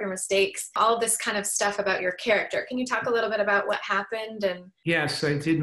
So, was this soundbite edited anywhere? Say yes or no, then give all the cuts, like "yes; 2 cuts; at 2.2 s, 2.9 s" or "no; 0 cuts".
yes; 2 cuts; at 0.8 s, 4.7 s